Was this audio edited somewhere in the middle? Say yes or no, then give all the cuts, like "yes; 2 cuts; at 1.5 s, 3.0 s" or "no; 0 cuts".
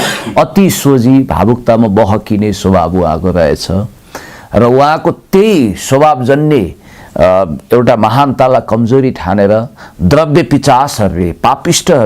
no; 0 cuts